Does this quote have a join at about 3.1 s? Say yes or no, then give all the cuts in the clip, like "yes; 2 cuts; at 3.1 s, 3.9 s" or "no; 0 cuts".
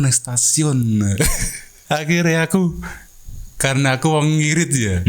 no; 1 cut; at 1.7 s